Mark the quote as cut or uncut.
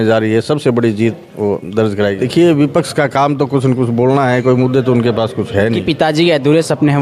cut